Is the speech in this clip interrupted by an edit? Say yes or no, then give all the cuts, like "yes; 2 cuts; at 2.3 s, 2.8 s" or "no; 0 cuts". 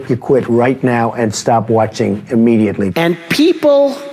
yes; 1 cut; at 2.9 s